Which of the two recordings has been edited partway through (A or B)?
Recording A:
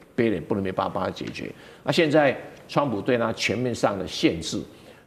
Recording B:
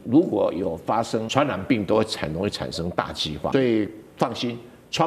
B